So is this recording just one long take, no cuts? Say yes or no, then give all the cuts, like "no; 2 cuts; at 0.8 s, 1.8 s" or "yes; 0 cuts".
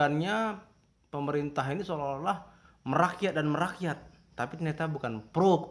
yes; 0 cuts